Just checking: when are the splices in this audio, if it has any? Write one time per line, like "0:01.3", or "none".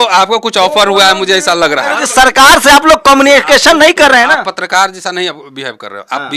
0:02.0